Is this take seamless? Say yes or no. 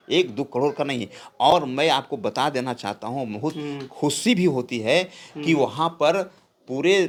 yes